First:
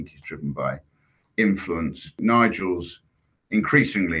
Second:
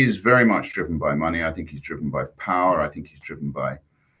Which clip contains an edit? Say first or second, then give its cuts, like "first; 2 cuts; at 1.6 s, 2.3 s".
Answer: first; 1 cut; at 2.2 s